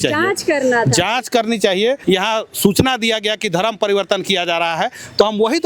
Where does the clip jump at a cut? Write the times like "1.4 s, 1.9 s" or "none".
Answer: 2.0 s